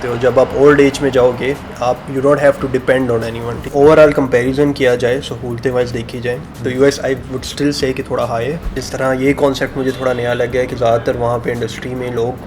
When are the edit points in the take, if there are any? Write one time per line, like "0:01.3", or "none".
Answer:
0:03.7
0:08.9